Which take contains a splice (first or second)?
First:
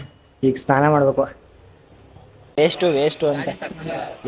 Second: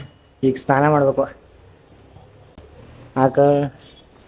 first